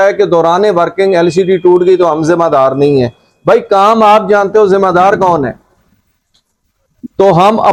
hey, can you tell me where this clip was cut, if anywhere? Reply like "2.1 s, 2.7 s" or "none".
none